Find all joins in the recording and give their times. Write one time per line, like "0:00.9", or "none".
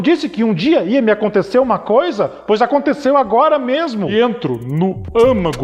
0:04.1